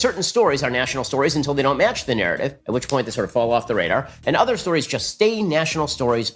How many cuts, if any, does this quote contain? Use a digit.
1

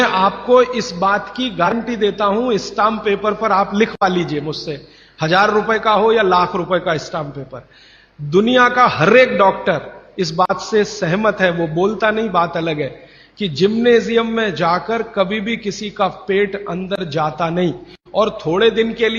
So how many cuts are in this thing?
1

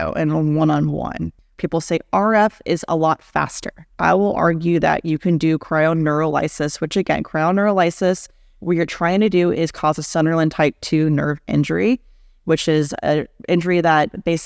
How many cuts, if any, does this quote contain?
2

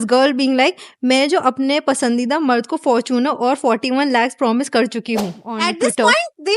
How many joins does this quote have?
1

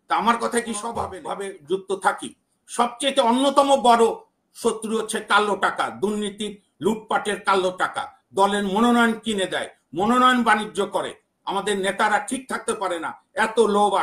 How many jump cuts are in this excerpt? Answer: 1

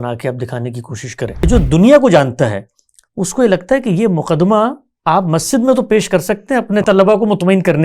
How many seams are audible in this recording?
2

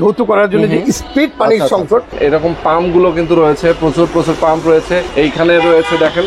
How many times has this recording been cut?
2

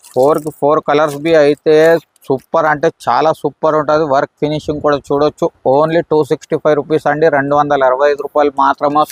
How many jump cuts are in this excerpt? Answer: 0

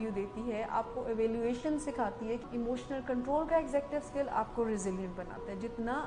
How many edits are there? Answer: 1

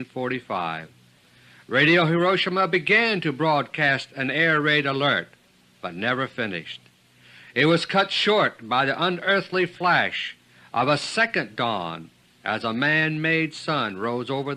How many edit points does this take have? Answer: 1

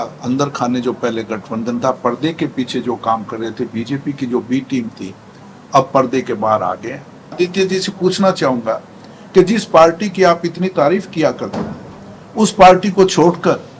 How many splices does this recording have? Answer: 1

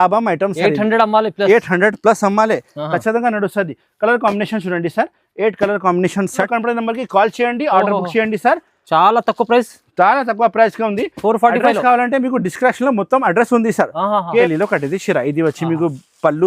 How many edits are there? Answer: 2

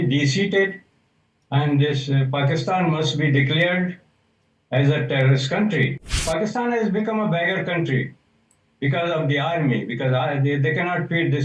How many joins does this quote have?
1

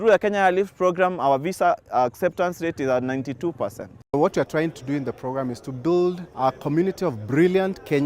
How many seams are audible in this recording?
2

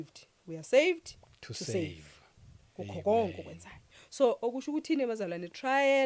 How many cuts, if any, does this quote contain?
0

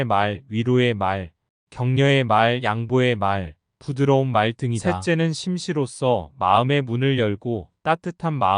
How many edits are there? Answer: 1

